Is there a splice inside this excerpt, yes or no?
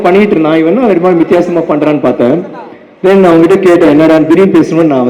no